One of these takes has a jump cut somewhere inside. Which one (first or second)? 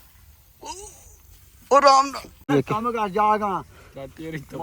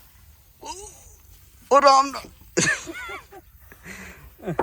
first